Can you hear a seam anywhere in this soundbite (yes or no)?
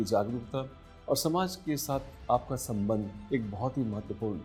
no